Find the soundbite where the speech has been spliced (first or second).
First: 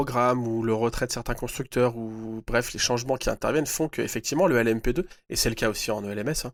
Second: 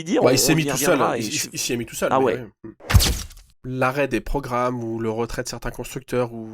second